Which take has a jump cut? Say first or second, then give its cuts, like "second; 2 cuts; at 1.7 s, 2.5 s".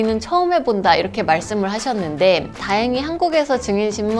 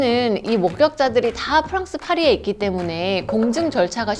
first; 1 cut; at 2.6 s